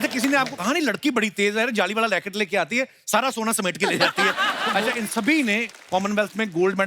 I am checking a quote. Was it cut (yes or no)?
yes